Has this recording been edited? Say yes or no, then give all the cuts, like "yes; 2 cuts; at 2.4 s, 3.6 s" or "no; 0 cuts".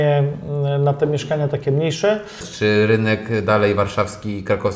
yes; 1 cut; at 2.4 s